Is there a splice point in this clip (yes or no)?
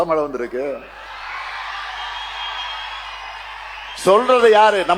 no